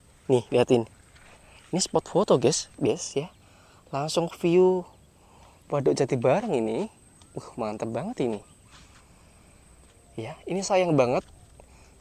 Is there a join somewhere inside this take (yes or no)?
yes